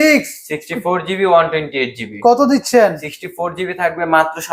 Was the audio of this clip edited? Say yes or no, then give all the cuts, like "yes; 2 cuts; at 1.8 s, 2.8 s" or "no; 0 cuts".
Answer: no; 0 cuts